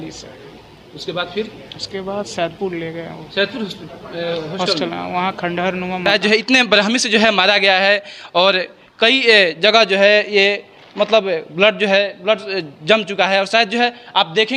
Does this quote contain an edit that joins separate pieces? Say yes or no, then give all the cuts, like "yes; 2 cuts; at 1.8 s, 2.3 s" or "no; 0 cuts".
yes; 1 cut; at 6.0 s